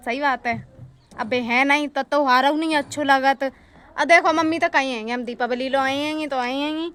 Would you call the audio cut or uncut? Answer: uncut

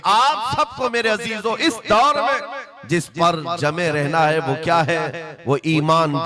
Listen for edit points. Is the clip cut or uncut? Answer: uncut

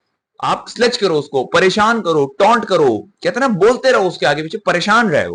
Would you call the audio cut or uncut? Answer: uncut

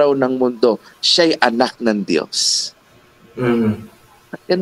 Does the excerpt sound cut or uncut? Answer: uncut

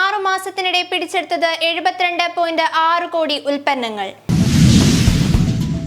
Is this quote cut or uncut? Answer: cut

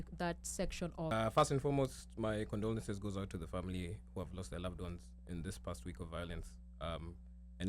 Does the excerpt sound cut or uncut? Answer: cut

